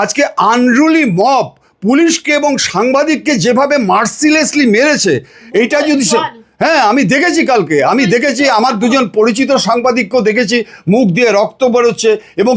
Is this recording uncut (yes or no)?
yes